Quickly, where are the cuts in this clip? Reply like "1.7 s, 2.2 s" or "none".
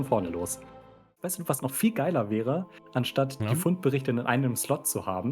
1.2 s